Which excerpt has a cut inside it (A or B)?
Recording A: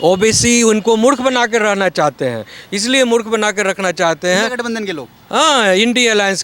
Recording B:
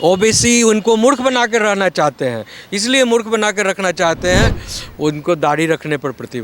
B